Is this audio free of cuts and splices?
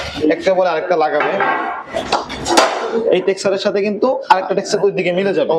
yes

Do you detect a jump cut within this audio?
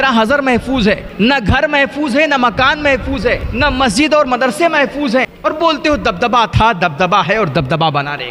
yes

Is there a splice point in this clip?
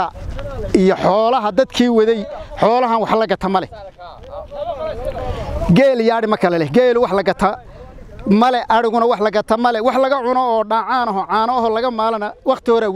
no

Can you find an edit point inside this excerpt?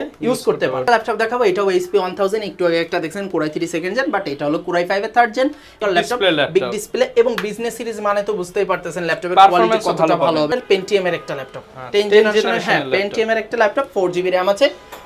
yes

